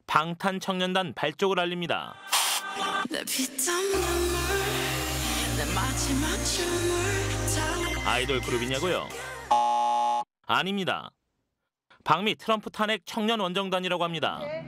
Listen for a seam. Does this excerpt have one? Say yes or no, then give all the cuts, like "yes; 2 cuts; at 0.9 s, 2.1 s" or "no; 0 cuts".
yes; 1 cut; at 5.1 s